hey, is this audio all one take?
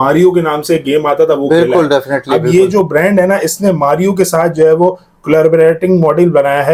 yes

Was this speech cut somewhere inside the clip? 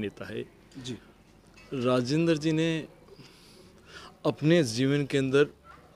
no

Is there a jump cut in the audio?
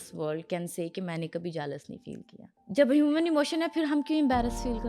no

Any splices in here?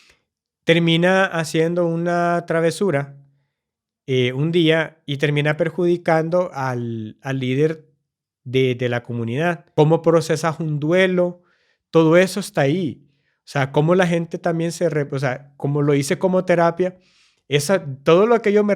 yes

